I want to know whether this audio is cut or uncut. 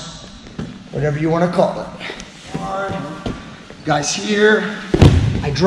cut